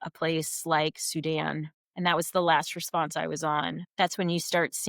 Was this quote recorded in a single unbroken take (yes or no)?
no